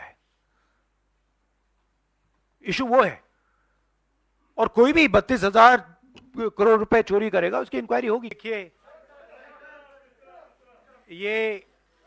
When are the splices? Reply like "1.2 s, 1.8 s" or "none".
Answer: 8.4 s